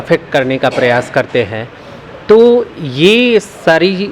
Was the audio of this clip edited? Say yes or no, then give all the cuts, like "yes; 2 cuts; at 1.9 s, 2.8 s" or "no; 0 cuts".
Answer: no; 0 cuts